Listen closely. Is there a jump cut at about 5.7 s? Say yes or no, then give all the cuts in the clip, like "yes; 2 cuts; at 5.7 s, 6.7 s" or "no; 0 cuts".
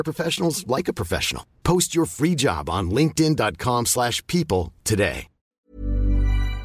yes; 1 cut; at 5.7 s